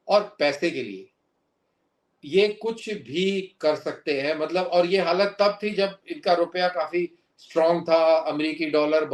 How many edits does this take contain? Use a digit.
0